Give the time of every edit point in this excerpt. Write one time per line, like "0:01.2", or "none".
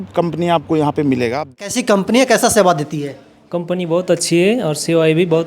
0:02.1